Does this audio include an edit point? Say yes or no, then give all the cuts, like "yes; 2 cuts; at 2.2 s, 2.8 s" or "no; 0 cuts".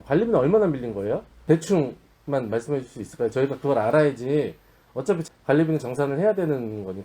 yes; 2 cuts; at 1.3 s, 5.2 s